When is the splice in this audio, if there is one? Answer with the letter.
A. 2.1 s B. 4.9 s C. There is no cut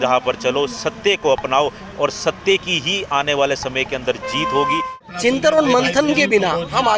B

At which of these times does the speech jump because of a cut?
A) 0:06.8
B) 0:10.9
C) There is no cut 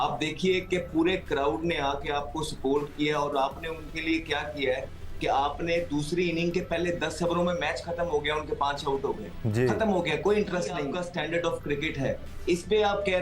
B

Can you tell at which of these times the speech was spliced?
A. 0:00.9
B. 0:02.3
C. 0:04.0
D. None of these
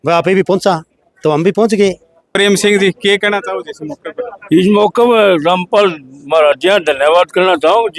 B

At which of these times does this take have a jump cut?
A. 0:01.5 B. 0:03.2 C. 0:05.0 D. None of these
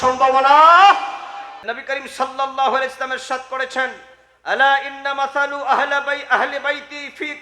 A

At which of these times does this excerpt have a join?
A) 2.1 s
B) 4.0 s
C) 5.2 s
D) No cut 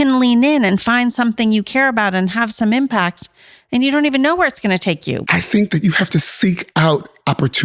C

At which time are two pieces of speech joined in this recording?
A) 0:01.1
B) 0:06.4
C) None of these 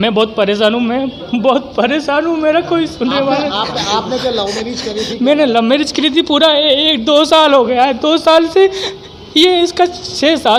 C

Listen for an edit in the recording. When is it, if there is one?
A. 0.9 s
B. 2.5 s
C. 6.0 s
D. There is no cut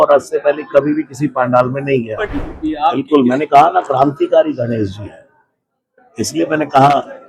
B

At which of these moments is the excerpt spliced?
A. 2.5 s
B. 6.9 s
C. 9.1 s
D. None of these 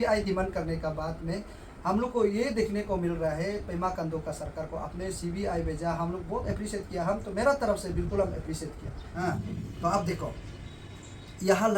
C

